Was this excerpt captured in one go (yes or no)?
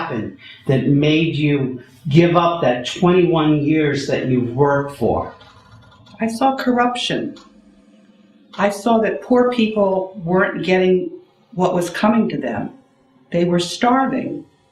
no